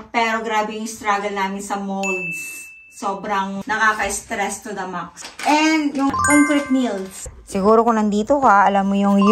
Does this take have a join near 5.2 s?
yes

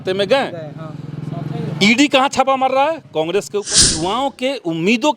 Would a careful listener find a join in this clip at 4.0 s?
yes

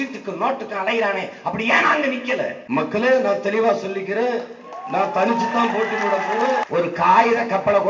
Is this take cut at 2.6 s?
yes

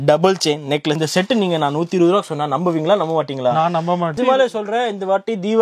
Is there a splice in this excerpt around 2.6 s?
no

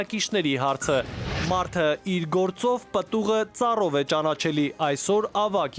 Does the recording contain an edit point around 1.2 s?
yes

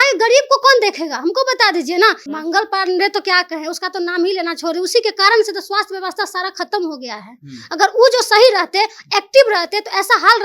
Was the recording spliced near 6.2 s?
no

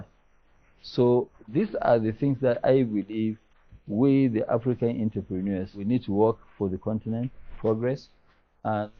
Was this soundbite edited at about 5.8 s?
yes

